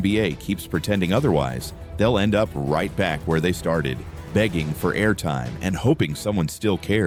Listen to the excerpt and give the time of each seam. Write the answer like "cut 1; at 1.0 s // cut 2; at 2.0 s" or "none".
none